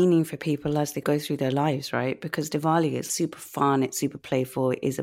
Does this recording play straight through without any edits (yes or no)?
no